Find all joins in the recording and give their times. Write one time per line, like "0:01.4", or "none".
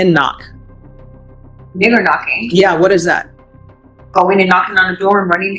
none